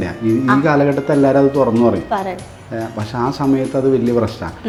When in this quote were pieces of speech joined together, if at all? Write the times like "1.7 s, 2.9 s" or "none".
none